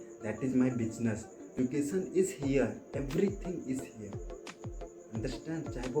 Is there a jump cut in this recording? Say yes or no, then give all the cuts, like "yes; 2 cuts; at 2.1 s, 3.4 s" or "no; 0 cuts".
yes; 1 cut; at 1.4 s